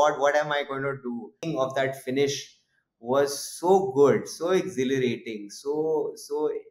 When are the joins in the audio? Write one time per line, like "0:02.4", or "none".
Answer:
0:01.5